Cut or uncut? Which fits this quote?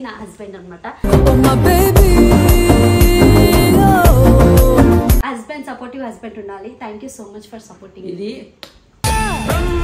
cut